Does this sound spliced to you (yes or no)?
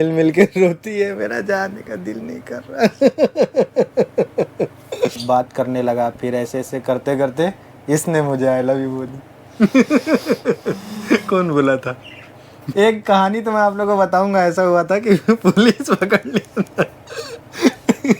yes